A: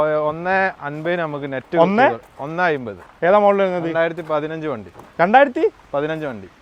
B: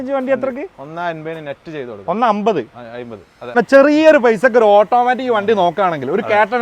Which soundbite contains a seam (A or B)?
B